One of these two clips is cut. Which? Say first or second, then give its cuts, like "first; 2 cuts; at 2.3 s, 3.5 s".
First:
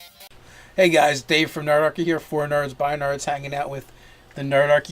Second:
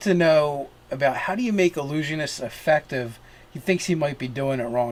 first; 1 cut; at 2.3 s